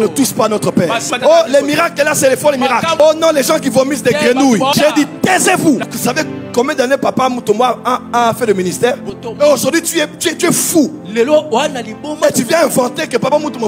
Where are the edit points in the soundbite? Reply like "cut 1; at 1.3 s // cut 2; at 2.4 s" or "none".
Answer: cut 1; at 1.1 s // cut 2; at 3.0 s // cut 3; at 4.7 s // cut 4; at 5.8 s // cut 5; at 9.0 s